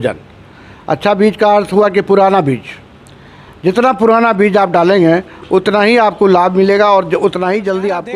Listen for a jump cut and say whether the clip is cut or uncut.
uncut